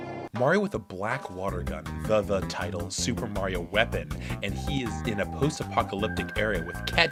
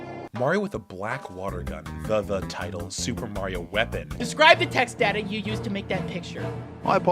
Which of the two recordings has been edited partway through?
second; 1 cut; at 4.2 s

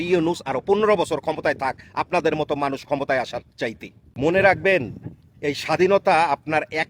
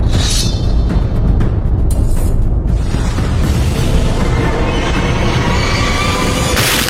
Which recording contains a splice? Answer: first; 1 cut; at 4.1 s

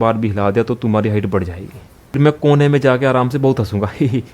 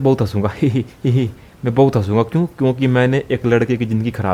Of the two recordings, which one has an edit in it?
first; 1 cut; at 2.2 s

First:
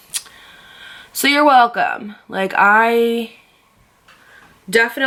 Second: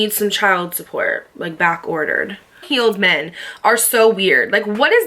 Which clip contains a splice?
second; 1 cut; at 2.6 s

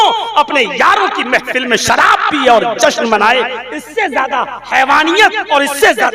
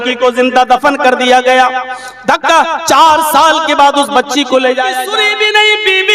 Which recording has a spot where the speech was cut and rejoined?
second; 1 cut; at 4.9 s

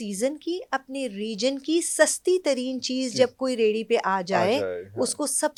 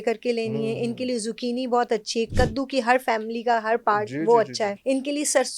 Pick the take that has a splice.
second; 2 cuts; at 2.3 s, 4.8 s

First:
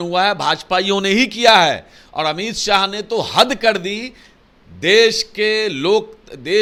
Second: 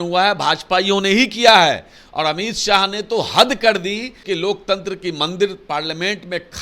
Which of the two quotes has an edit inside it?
second; 1 cut; at 4.2 s

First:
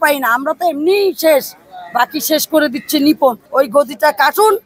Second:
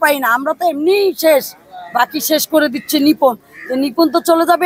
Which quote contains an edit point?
first; 1 cut; at 3.4 s

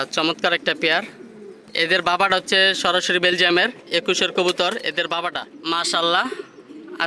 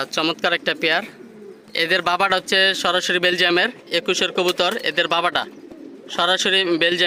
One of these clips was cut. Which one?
first; 1 cut; at 5.5 s

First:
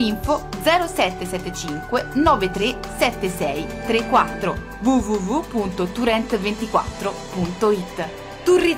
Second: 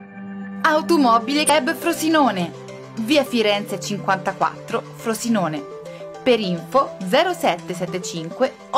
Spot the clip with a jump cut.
second; 1 cut; at 1.5 s

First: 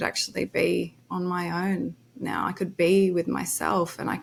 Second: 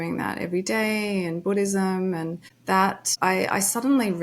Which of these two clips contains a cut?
second; 1 cut; at 2.9 s

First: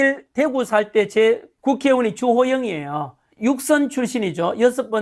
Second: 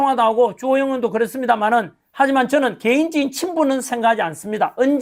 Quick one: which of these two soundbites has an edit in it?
first; 2 cuts; at 1.5 s, 3.2 s

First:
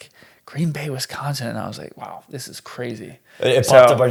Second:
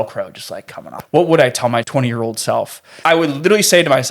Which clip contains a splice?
second; 3 cuts; at 0.9 s, 1.9 s, 2.9 s

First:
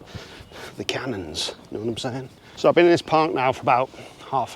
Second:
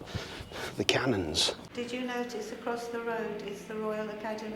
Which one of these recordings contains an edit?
second; 1 cut; at 1.6 s

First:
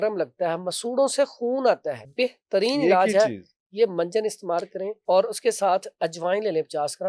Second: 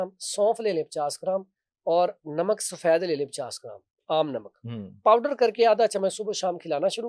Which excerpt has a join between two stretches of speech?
first; 2 cuts; at 2.0 s, 4.9 s

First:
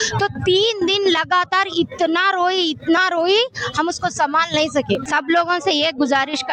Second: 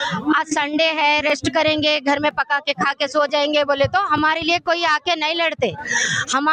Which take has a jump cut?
first; 1 cut; at 5.1 s

